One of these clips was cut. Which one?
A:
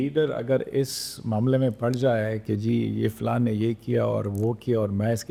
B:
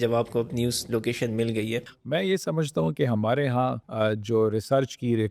B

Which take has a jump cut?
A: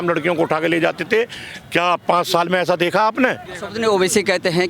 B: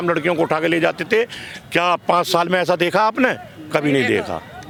A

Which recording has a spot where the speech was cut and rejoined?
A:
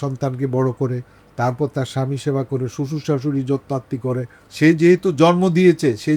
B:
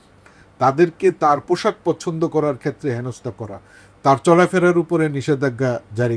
A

